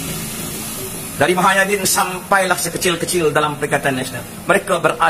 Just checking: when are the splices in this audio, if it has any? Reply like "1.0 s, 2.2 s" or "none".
none